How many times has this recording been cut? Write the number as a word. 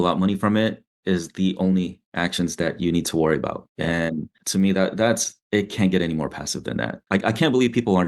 one